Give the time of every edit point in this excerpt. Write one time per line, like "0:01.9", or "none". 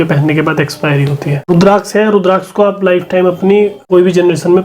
0:01.5
0:03.8